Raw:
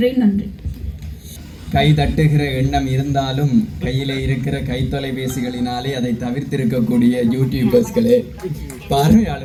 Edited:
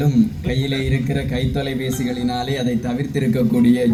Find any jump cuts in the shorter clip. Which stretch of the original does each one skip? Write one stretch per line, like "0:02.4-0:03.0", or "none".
none